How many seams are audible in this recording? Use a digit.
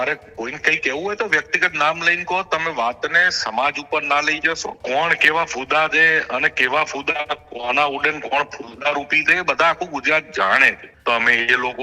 2